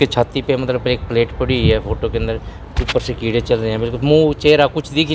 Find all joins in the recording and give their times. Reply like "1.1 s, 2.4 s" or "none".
none